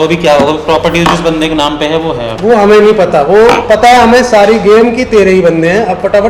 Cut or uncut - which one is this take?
uncut